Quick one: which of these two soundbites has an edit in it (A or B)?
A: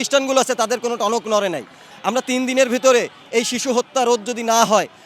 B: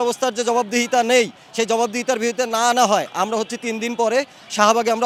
A